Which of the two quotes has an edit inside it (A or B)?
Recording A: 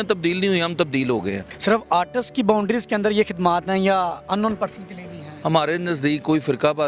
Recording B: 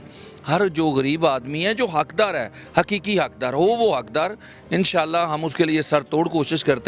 A